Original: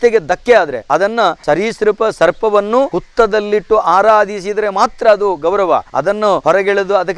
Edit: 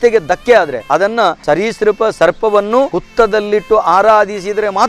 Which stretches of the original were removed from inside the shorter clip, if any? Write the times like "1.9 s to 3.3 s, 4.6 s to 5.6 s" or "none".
none